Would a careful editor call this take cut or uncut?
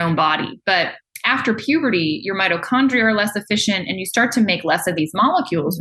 uncut